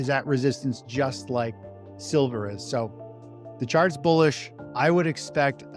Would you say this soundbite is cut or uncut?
uncut